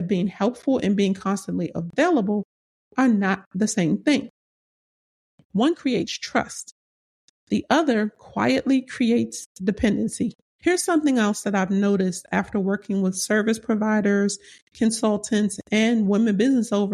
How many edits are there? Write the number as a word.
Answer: one